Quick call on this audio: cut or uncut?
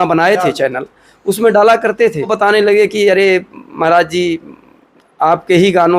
cut